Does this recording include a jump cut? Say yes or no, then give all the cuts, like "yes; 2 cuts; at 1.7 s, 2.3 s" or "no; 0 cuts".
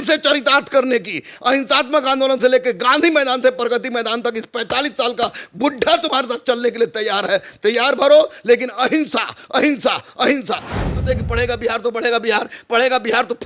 yes; 1 cut; at 10.7 s